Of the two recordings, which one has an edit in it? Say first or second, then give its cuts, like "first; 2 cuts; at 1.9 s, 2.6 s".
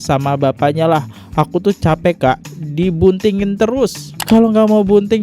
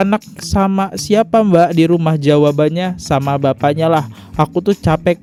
first; 1 cut; at 4.1 s